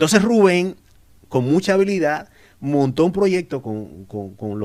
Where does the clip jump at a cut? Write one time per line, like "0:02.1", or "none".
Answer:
none